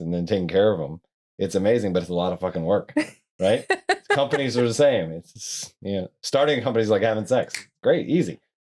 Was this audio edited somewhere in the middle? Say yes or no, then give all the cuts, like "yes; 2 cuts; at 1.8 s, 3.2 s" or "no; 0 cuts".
no; 0 cuts